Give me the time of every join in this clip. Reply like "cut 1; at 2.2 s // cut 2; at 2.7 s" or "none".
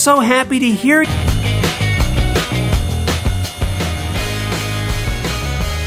none